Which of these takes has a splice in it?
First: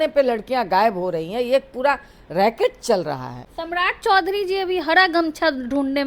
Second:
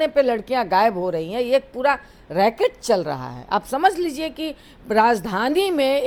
first; 1 cut; at 3.3 s

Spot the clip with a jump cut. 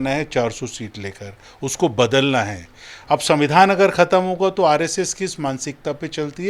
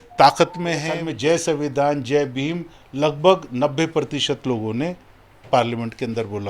second; 1 cut; at 1.0 s

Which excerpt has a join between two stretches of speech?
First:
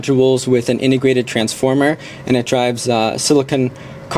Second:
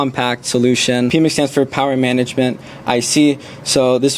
second; 1 cut; at 1.1 s

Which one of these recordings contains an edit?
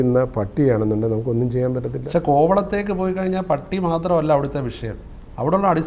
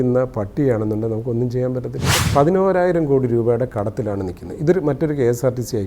second; 1 cut; at 2.0 s

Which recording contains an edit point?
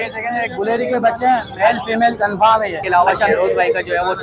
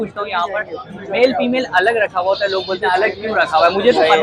first; 1 cut; at 2.8 s

